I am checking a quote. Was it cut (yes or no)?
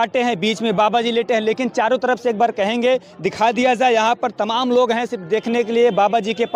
no